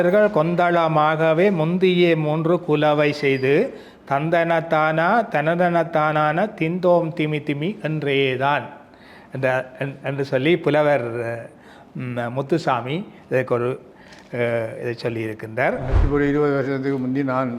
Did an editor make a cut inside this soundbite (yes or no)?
yes